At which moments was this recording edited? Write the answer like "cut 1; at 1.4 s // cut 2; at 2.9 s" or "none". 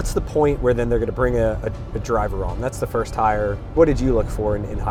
none